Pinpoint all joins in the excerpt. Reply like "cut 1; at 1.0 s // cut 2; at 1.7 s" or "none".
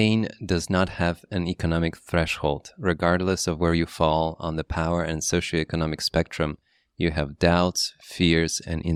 none